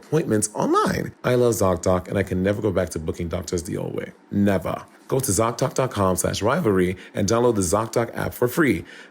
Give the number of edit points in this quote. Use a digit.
1